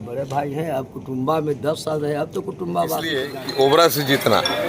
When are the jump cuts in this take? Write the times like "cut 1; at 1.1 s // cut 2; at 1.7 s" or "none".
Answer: cut 1; at 3.4 s